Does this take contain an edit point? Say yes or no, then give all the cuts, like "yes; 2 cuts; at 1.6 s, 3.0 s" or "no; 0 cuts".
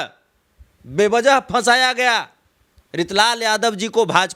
no; 0 cuts